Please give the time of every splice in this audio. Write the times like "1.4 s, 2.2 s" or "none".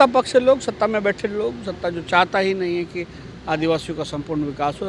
none